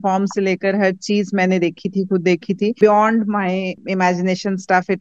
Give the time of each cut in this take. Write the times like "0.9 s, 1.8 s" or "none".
2.7 s, 3.8 s